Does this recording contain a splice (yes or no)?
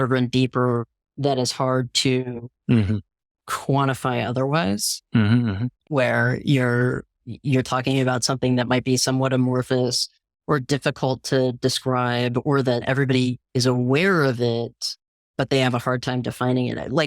yes